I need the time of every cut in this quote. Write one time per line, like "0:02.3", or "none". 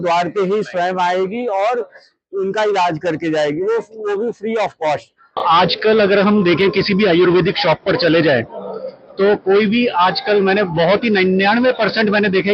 0:05.4